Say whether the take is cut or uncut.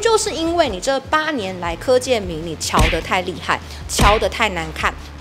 uncut